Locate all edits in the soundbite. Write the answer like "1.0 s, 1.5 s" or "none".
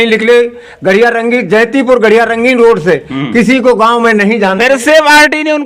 none